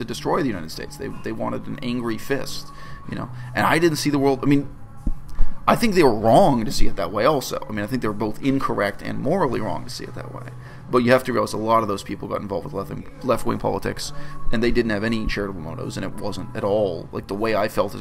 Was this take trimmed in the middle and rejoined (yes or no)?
no